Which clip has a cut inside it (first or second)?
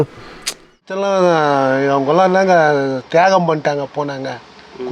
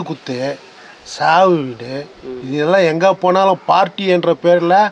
first